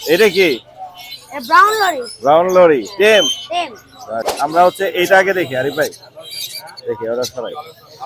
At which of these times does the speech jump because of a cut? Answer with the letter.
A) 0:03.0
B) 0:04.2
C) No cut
B